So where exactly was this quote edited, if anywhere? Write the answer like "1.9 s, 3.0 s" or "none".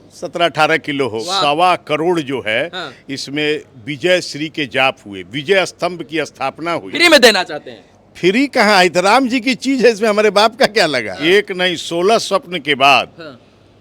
1.2 s, 6.9 s, 11.1 s